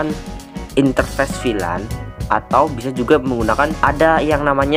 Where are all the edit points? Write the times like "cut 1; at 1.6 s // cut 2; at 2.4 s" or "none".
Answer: none